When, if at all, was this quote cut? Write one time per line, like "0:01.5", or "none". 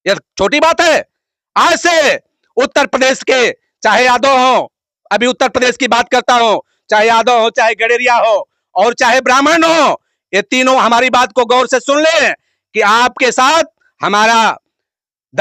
none